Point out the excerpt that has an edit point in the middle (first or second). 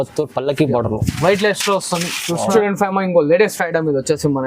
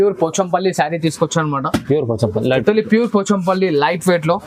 first